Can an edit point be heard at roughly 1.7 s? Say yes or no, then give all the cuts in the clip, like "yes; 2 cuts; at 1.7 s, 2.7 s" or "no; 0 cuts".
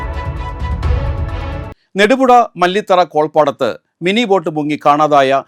yes; 1 cut; at 1.7 s